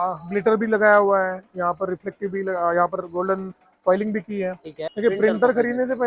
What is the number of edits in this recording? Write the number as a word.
one